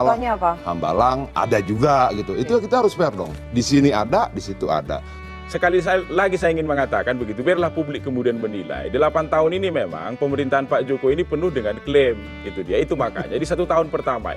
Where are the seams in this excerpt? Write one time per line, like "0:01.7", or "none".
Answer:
0:05.2